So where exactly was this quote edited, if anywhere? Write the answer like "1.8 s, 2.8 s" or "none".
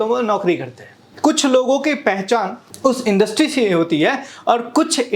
1.0 s, 2.6 s

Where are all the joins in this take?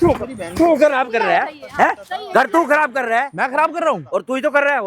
none

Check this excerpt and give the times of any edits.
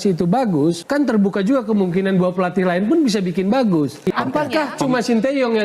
4.0 s

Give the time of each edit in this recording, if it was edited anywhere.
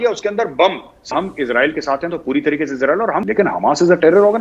1.1 s, 3.2 s

